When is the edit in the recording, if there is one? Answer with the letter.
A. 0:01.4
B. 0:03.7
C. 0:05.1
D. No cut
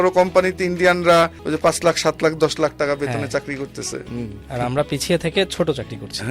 A